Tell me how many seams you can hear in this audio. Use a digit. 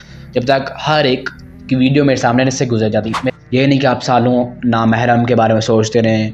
1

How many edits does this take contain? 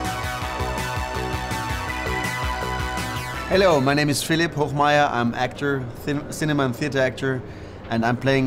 1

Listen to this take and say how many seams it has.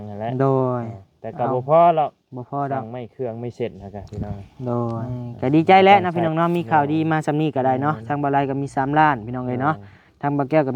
1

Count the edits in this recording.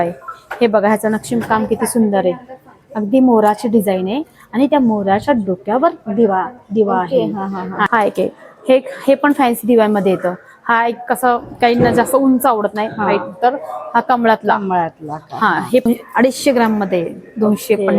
2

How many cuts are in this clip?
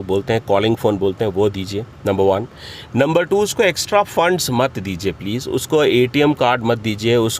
0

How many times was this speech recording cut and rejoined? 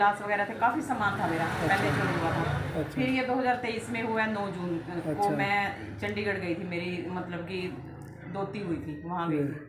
0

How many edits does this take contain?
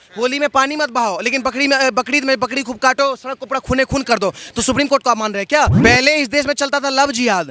1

